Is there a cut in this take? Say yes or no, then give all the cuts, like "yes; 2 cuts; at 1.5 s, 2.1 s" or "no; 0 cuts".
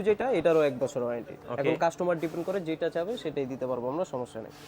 no; 0 cuts